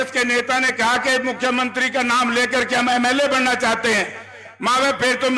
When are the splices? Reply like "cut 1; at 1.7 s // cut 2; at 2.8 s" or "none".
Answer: none

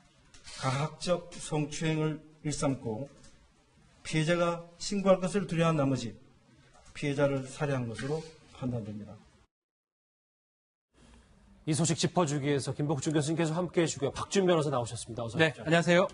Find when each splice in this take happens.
cut 1; at 11.7 s

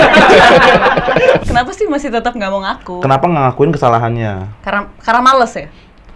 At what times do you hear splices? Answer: cut 1; at 1.5 s

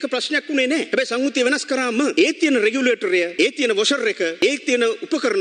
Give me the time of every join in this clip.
cut 1; at 0.9 s // cut 2; at 2.1 s // cut 3; at 3.3 s // cut 4; at 4.4 s

